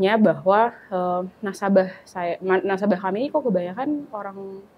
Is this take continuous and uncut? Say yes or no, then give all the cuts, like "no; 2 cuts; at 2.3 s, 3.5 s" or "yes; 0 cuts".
yes; 0 cuts